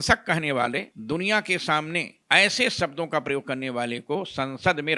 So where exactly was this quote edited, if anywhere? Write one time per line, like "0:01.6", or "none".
0:00.9